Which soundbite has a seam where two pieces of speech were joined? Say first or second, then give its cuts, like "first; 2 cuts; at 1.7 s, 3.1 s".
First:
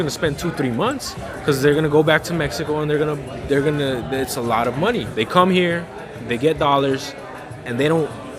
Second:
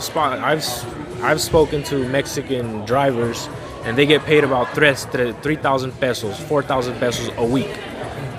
first; 1 cut; at 5.1 s